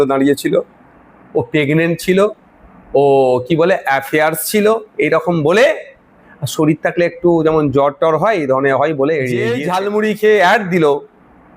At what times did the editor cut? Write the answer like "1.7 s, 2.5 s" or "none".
9.5 s